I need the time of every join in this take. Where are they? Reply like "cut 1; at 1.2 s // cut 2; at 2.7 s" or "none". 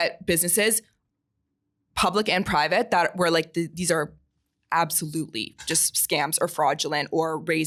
none